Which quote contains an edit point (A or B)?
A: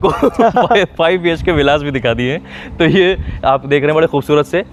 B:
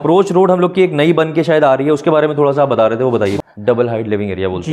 B